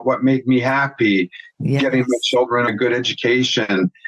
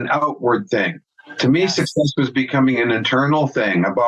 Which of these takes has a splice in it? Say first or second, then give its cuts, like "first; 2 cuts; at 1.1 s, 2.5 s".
first; 1 cut; at 2.7 s